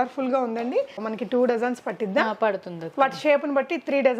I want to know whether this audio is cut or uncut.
cut